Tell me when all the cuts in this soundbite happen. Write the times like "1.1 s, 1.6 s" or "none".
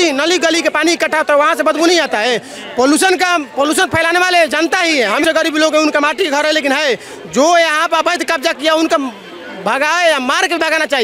5.2 s